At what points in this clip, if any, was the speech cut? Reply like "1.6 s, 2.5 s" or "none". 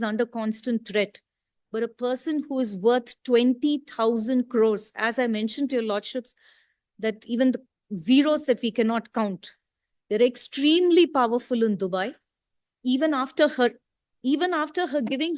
none